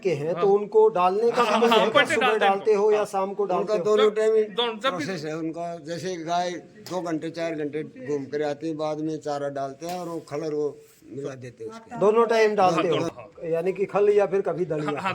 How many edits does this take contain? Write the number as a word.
one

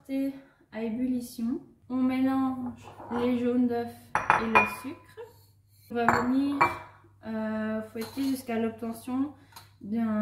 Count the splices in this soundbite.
two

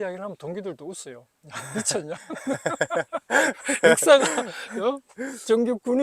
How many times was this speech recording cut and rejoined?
zero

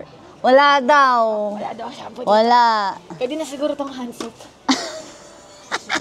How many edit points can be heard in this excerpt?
zero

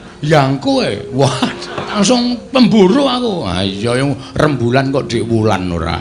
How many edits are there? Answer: one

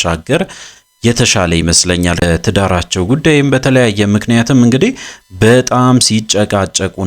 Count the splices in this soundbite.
one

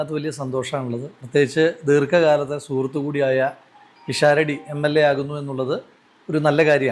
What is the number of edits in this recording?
zero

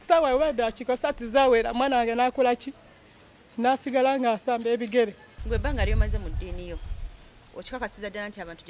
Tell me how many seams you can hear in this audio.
one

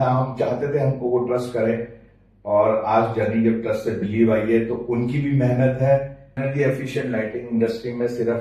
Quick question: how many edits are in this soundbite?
one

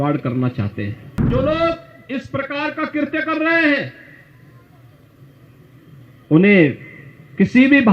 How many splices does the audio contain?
one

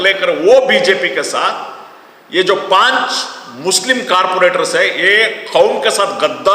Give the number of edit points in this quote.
zero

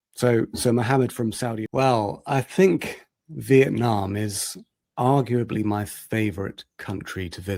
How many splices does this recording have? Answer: one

